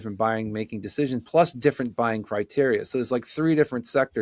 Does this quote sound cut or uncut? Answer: uncut